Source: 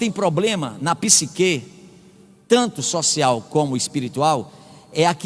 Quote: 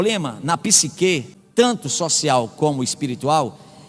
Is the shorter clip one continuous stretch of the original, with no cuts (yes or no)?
no